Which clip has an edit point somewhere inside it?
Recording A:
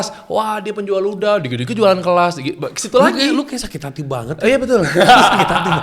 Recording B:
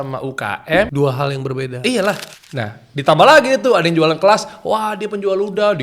B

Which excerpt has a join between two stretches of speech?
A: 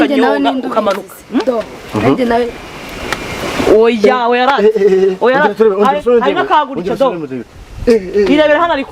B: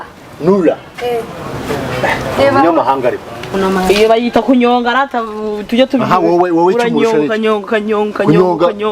B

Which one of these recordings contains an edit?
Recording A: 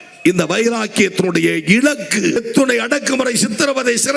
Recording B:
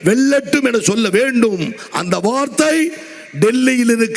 A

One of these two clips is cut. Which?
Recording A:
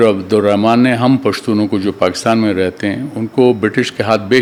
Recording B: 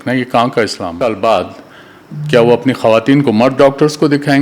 B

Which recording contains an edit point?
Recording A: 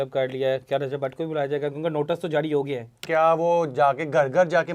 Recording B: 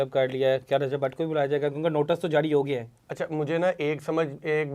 A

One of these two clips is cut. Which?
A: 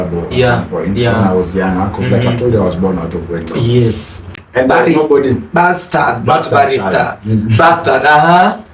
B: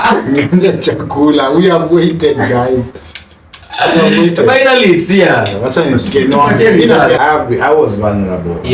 B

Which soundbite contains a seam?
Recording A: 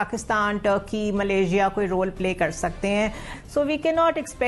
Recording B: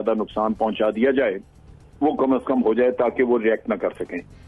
A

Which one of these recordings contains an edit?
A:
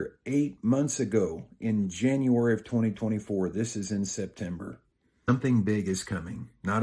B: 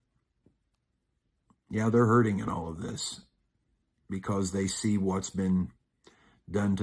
A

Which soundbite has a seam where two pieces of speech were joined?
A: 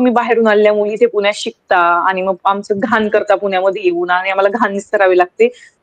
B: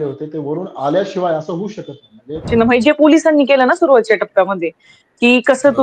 B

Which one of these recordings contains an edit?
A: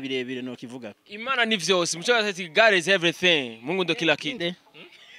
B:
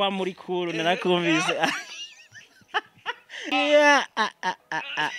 B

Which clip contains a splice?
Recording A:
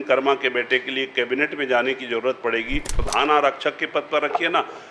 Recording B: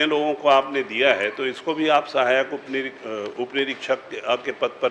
A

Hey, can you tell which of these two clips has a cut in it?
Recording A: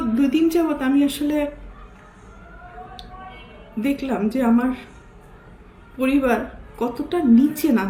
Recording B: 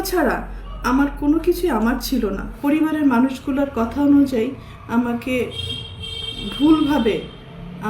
B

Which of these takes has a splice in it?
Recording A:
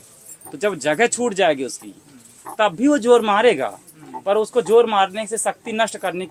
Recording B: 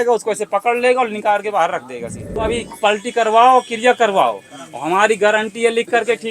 B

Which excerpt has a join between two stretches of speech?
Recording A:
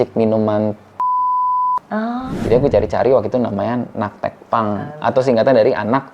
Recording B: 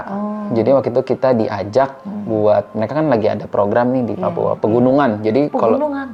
A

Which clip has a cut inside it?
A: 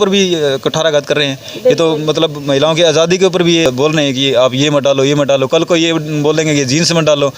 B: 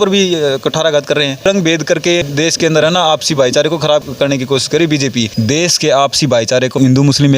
B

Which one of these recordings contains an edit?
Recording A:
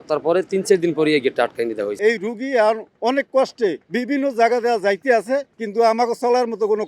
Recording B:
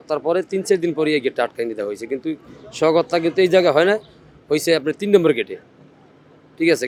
A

